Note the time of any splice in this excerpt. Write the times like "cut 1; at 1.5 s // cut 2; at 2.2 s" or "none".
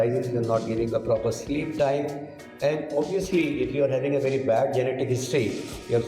none